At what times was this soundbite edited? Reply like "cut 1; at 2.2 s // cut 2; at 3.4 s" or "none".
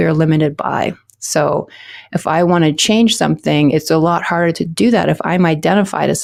none